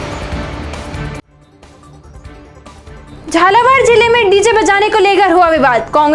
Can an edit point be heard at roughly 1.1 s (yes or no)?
no